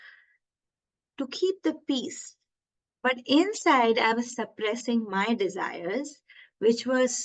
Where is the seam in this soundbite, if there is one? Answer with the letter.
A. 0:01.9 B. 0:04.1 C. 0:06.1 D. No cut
B